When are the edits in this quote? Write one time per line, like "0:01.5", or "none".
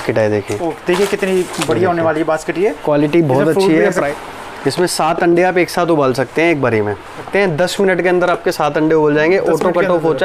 0:04.1
0:07.2